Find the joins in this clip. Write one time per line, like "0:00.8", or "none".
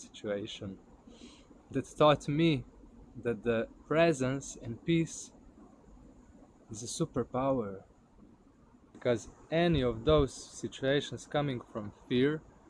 0:08.9